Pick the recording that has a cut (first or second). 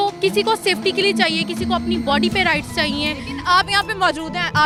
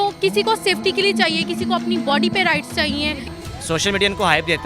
second